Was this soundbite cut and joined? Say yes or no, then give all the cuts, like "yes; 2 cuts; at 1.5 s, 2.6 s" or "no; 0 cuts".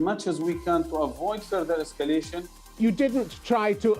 yes; 1 cut; at 2.6 s